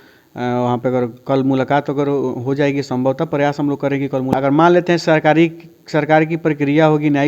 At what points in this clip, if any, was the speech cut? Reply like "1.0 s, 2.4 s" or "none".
4.3 s